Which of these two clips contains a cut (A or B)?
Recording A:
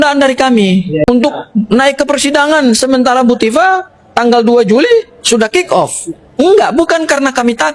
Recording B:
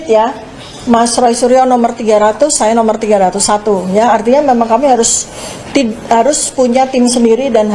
A